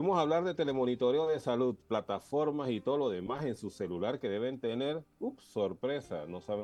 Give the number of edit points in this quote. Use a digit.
0